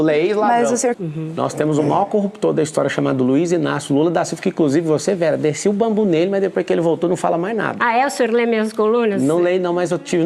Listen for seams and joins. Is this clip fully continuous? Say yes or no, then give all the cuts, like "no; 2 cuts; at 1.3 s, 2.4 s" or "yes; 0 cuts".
yes; 0 cuts